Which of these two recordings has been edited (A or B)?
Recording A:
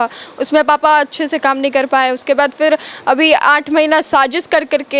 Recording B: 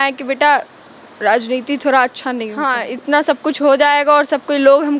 B